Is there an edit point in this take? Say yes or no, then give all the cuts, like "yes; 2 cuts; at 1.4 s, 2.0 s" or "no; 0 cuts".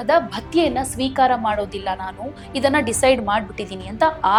no; 0 cuts